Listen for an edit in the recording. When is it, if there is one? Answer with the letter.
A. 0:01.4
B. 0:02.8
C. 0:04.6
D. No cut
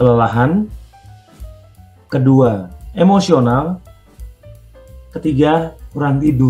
D